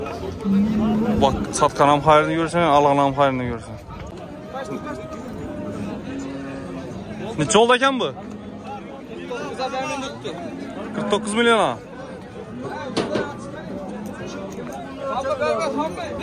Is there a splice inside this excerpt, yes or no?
yes